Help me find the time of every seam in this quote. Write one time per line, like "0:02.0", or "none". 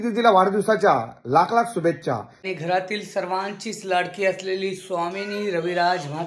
0:02.5